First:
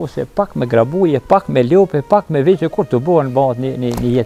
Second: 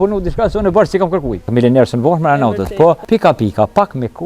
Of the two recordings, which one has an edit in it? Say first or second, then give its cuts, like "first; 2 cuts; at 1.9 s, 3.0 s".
second; 2 cuts; at 1.5 s, 3.0 s